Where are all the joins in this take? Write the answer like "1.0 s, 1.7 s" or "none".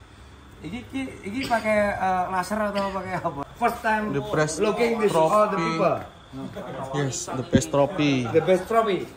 3.4 s

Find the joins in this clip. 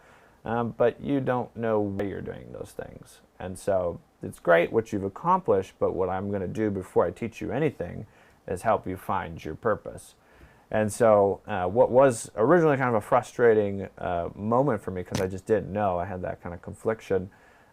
2.0 s

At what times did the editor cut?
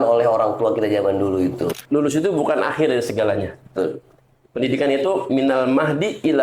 1.7 s

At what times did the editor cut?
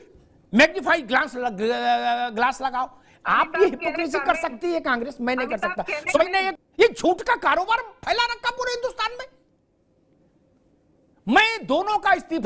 6.6 s, 10.1 s

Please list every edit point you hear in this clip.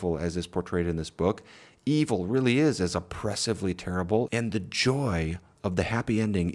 4.3 s

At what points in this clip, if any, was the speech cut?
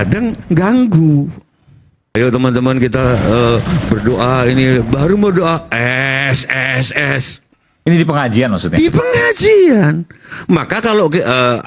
2.1 s

